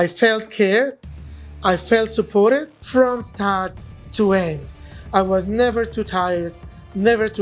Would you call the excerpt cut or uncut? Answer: cut